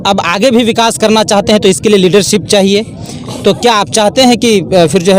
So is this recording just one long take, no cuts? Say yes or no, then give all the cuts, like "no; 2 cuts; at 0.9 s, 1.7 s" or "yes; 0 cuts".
yes; 0 cuts